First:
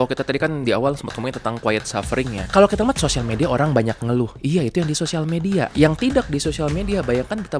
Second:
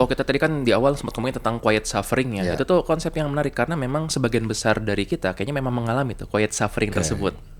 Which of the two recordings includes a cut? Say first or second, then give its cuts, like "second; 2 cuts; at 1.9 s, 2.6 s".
first; 2 cuts; at 2.4 s, 5.7 s